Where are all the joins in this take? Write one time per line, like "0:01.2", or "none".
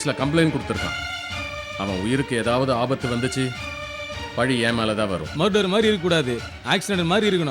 none